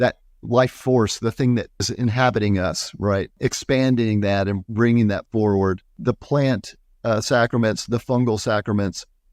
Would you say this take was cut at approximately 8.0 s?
no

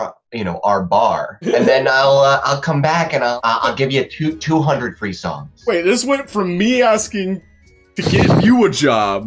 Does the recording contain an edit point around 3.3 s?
yes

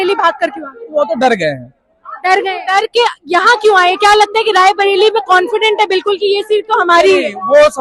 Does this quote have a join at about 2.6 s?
yes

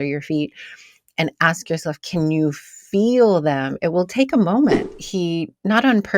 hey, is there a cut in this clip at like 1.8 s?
no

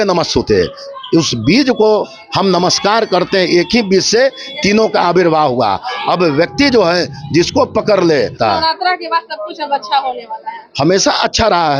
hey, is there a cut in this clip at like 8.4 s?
yes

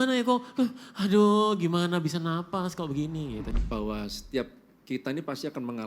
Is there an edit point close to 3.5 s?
yes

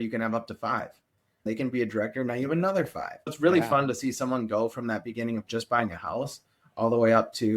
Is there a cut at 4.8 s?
no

